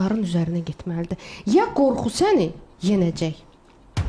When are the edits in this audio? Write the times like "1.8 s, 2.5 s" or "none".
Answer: none

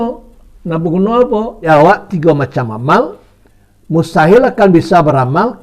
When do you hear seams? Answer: 1.6 s

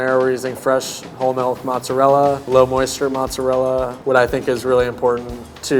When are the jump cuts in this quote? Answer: 2.5 s, 4.0 s

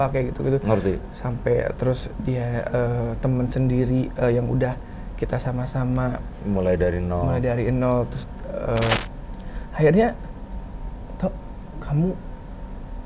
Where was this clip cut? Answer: 9.0 s

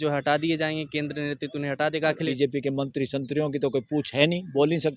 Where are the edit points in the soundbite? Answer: 2.2 s

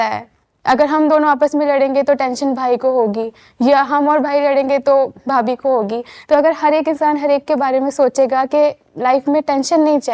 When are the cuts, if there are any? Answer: none

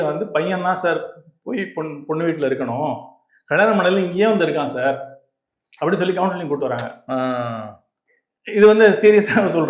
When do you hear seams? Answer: none

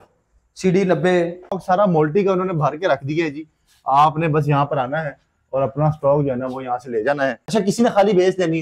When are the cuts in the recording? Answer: 1.6 s, 7.4 s

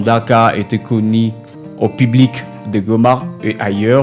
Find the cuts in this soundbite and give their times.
none

